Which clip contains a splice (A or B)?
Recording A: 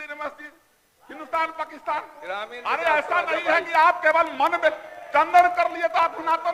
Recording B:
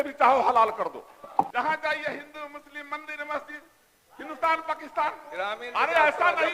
B